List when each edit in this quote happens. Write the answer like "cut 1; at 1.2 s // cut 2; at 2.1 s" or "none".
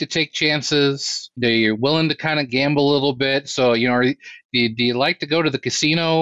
cut 1; at 1.4 s